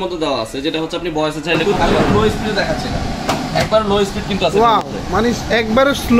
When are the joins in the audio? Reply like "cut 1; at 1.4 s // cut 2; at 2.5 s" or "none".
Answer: cut 1; at 1.6 s